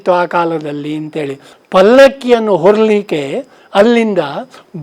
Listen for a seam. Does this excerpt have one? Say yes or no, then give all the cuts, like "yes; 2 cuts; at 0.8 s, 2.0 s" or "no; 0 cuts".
yes; 1 cut; at 1.5 s